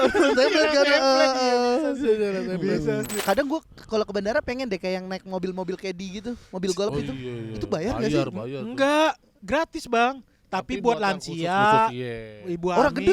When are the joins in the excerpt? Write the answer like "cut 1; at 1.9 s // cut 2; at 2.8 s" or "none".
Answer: cut 1; at 3.2 s